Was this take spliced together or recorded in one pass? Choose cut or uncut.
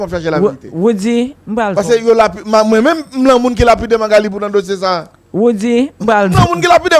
uncut